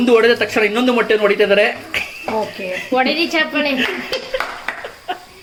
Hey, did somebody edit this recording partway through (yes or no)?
no